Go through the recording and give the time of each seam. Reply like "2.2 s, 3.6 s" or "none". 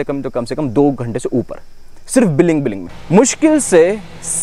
2.9 s